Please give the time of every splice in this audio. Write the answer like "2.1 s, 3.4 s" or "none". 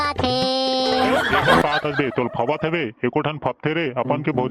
1.6 s